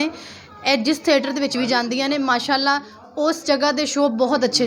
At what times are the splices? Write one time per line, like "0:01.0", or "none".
none